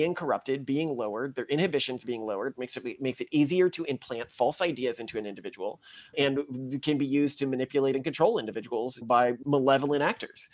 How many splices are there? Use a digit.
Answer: 1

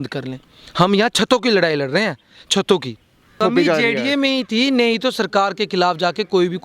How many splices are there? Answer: 1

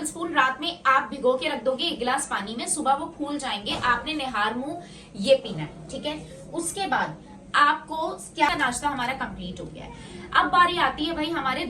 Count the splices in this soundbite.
1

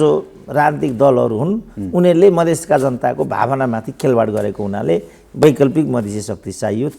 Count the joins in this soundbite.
0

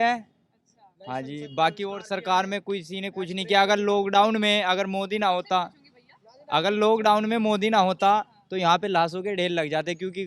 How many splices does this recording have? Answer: 0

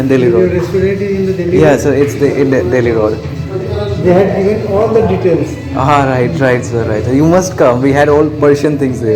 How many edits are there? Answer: 0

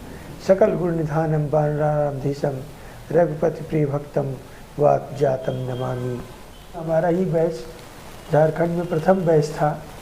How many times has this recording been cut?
1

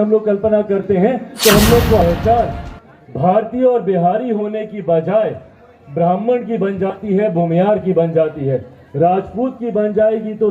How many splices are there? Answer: 1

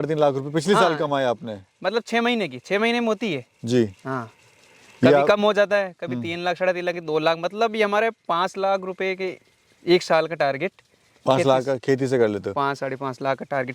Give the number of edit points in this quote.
0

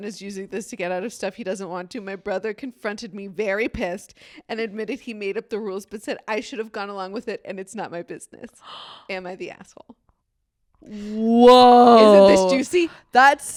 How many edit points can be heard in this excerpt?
0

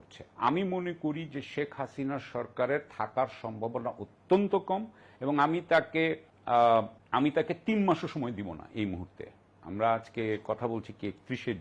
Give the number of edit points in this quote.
1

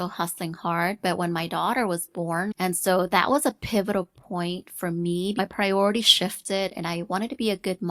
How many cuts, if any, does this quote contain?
2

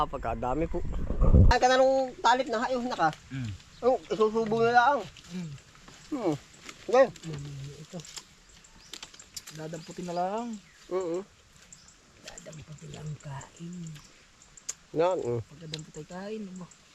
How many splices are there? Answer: 1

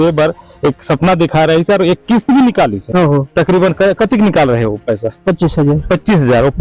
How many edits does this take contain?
0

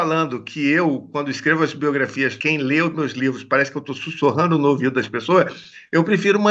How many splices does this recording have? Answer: 1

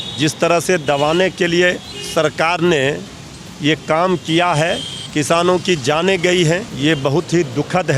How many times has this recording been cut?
3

